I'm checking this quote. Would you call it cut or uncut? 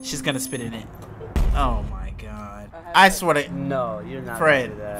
cut